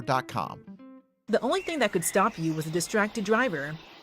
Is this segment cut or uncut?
cut